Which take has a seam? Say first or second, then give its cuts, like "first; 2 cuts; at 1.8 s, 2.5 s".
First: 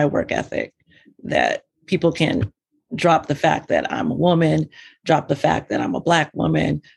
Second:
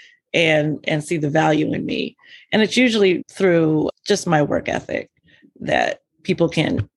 second; 1 cut; at 3.3 s